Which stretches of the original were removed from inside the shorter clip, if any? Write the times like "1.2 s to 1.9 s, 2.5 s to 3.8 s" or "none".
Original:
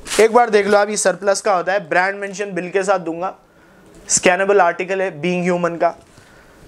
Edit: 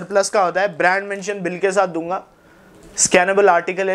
none